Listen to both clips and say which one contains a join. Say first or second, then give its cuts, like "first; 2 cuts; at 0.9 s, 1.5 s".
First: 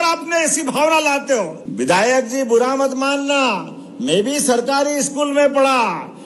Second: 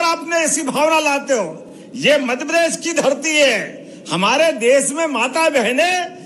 first; 1 cut; at 1.6 s